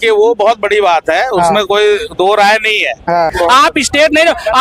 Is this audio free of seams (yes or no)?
no